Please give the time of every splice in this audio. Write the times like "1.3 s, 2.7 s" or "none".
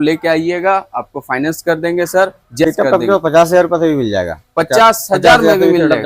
2.7 s